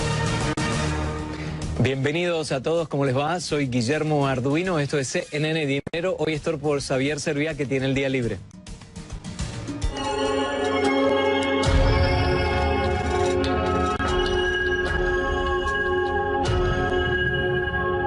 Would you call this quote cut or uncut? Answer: cut